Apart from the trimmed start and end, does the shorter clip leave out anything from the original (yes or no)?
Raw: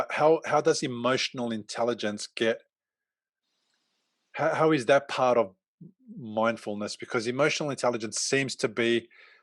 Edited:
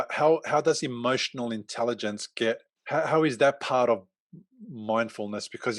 yes